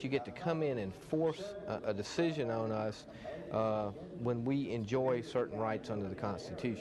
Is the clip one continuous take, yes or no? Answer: yes